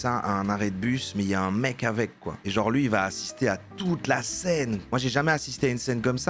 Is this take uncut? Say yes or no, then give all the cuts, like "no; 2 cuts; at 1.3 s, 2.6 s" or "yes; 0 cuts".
yes; 0 cuts